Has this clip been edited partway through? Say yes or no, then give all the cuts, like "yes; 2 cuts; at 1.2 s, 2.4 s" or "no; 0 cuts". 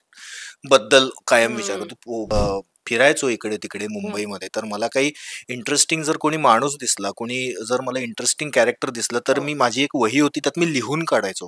yes; 1 cut; at 2.3 s